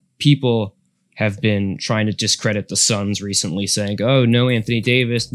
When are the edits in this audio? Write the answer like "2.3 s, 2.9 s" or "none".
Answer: none